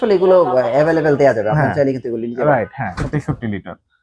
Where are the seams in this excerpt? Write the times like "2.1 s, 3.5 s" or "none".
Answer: 3.0 s